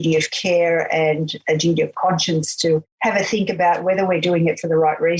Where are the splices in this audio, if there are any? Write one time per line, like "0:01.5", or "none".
none